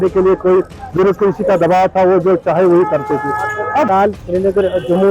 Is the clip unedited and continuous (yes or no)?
no